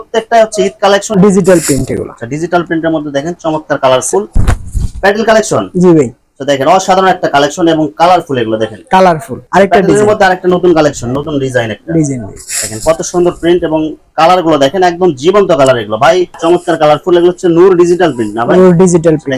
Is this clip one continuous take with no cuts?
no; 4 cuts; at 1.1 s, 4.3 s, 9.4 s, 16.3 s

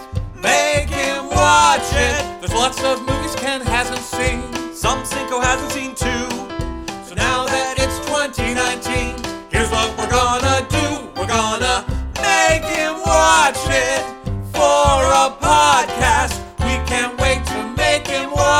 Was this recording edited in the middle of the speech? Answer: yes; 1 cut; at 2.2 s

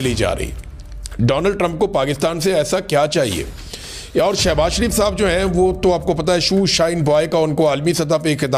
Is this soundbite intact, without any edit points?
yes; 0 cuts

